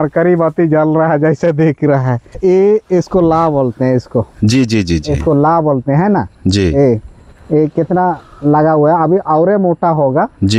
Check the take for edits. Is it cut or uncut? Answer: cut